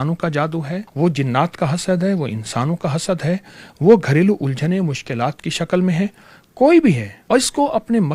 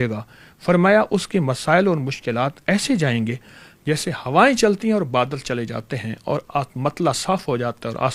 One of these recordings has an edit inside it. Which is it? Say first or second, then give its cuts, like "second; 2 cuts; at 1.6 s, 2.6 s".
first; 2 cuts; at 0.9 s, 7.1 s